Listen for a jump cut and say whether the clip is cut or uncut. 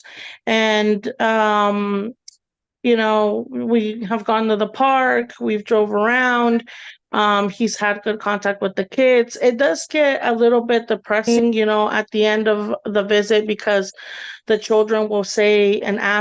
cut